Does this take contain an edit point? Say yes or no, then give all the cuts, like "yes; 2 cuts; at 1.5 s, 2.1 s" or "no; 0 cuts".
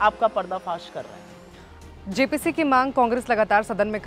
no; 0 cuts